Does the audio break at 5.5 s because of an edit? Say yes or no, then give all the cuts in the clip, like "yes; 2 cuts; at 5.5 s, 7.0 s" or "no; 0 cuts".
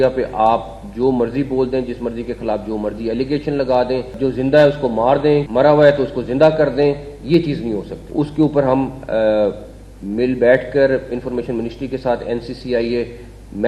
yes; 3 cuts; at 4.1 s, 5.5 s, 8.0 s